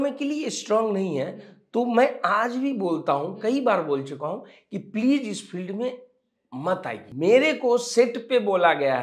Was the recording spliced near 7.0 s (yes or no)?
yes